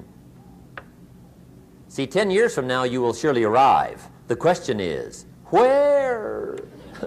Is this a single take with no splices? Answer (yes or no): yes